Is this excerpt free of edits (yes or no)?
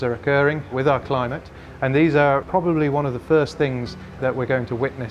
yes